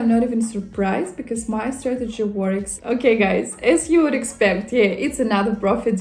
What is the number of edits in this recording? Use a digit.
1